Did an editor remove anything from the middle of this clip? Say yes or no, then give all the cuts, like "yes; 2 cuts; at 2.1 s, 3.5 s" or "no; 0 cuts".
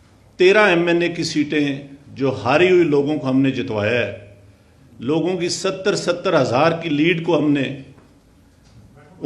no; 0 cuts